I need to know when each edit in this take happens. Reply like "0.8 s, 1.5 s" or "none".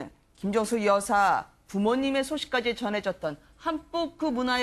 3.7 s